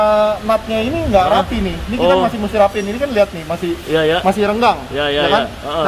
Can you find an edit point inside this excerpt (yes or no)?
no